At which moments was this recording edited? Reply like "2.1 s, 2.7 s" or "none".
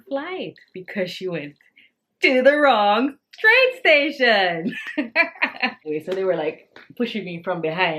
5.8 s